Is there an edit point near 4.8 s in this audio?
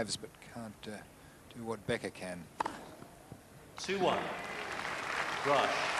no; 0 cuts

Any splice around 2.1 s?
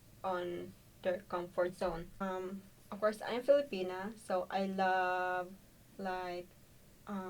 yes; 1 cut; at 2.1 s

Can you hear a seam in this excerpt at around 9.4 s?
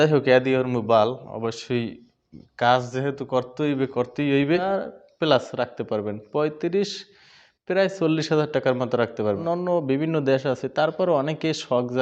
yes; 2 cuts; at 4.6 s, 9.4 s

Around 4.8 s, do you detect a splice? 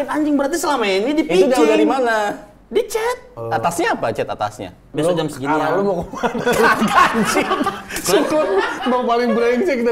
yes; 2 cuts; at 3.4 s, 4.8 s

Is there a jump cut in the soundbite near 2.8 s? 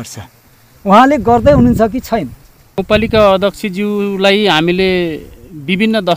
yes; 1 cut; at 2.8 s

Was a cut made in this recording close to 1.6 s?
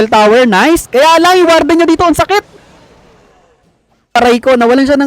no; 1 cut; at 4.2 s

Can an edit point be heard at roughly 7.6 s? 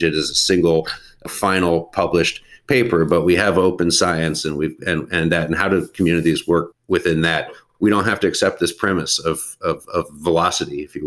yes; 2 cuts; at 6.8 s, 7.6 s

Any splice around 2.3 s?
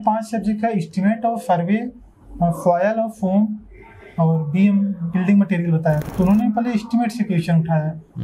no; 1 cut; at 6.1 s

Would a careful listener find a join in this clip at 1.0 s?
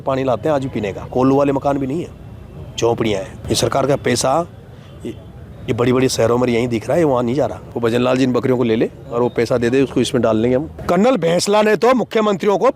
yes; 4 cuts; at 1.0 s, 3.4 s, 7.6 s, 10.7 s

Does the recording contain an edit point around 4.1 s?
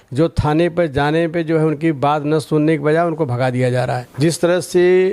yes; 1 cut; at 4.1 s

